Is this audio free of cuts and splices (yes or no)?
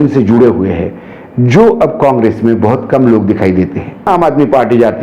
no